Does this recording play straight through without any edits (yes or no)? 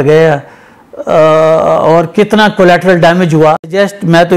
yes